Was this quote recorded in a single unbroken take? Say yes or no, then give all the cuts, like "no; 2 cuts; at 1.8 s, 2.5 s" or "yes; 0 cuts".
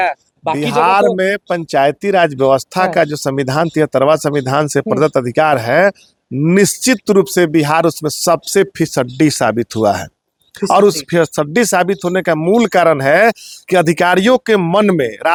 yes; 0 cuts